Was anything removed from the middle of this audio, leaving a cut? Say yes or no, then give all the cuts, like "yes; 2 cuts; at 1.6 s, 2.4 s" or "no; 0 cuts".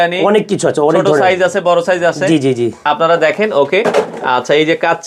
no; 0 cuts